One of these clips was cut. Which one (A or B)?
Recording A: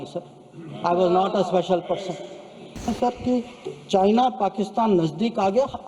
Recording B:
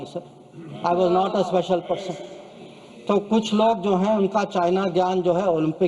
A